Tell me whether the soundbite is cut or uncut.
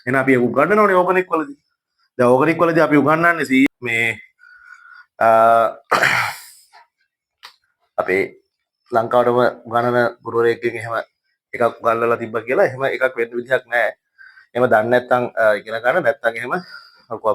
cut